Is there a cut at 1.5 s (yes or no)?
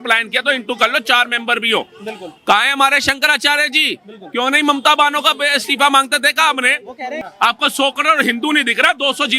no